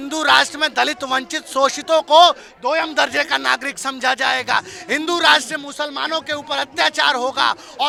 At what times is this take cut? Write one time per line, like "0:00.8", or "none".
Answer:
none